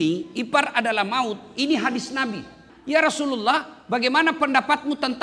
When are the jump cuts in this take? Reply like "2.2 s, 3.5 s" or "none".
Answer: 2.7 s